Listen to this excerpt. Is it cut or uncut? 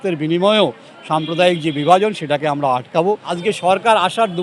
cut